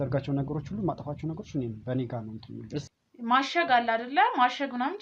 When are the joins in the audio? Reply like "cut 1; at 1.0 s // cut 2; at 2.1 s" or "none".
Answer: cut 1; at 2.9 s